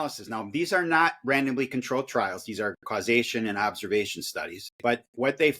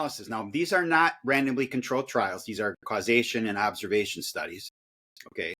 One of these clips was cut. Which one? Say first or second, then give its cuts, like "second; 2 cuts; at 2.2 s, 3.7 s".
first; 1 cut; at 4.6 s